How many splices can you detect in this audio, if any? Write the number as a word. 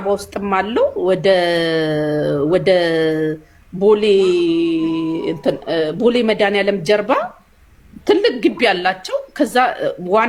zero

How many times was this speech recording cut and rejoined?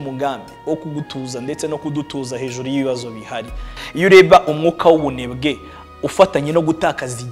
one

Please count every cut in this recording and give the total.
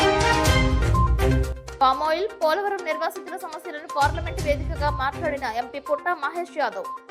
one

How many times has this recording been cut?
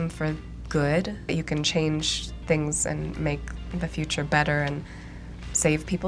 one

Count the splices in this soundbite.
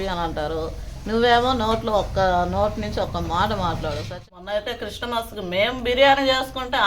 one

